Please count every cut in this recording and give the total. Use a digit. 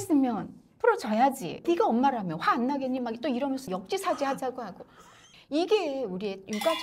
2